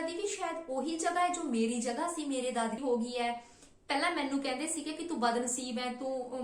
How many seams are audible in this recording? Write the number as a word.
one